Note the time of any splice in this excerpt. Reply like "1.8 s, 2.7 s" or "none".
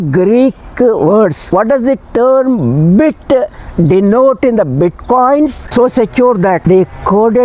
1.4 s, 5.6 s

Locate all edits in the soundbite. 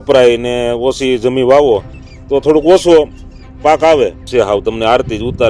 4.3 s

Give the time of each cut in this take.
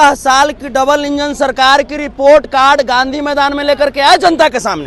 none

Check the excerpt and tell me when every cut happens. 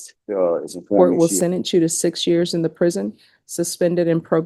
1.0 s

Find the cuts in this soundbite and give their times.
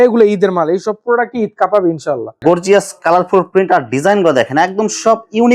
2.3 s

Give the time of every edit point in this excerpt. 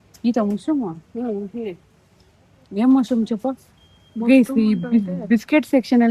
none

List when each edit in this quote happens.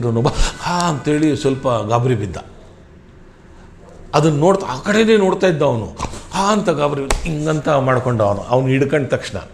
none

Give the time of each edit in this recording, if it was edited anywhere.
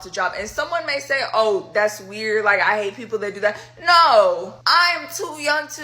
4.6 s

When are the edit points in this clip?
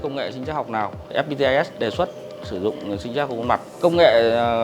1.1 s, 3.7 s

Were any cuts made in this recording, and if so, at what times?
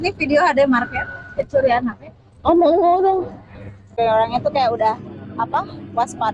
none

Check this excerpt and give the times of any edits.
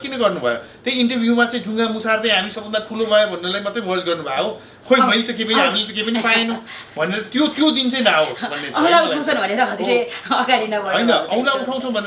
none

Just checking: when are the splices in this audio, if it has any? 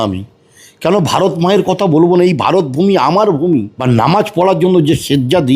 3.7 s

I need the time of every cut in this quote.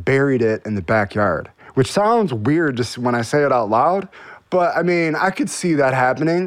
none

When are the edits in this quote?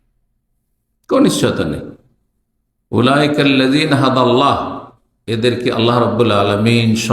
none

